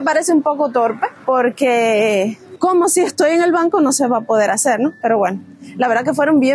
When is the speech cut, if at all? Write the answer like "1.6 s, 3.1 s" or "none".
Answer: none